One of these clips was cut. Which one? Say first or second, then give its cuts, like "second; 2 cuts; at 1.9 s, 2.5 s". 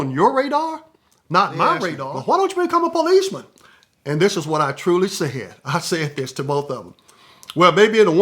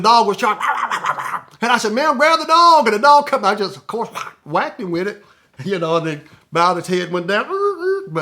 first; 1 cut; at 2.1 s